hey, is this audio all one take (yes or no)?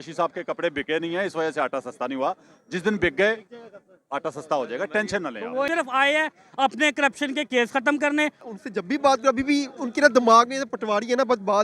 no